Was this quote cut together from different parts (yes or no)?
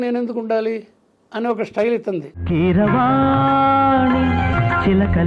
yes